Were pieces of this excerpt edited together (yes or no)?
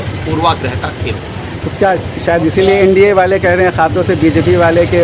no